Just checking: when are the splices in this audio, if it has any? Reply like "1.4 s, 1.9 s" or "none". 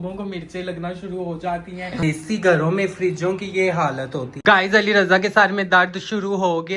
2.0 s, 4.3 s